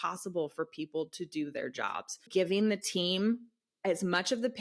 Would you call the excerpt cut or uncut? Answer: cut